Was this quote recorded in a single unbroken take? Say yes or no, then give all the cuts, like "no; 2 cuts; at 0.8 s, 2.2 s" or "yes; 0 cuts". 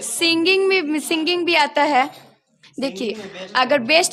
yes; 0 cuts